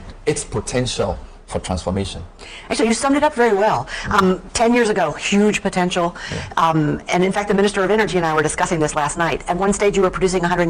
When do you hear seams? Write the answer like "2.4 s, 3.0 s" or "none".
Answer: none